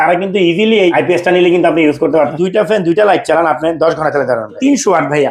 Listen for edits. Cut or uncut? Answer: cut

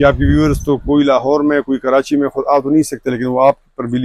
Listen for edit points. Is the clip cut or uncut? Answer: uncut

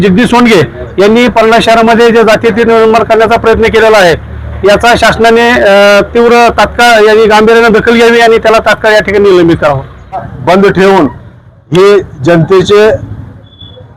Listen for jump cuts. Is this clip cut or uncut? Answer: cut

